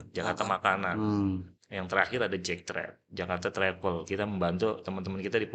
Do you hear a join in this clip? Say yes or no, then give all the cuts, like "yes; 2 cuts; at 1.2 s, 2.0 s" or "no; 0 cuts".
yes; 1 cut; at 1.6 s